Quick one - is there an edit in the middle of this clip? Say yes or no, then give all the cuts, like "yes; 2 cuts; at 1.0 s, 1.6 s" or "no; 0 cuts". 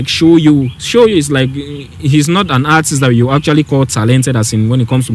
no; 0 cuts